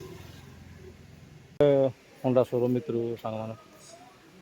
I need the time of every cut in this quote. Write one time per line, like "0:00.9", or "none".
0:01.6